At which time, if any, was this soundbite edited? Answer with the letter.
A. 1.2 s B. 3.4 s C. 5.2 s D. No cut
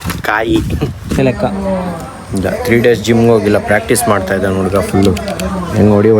A